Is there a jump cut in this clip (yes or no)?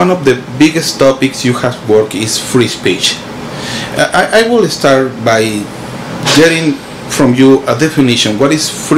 no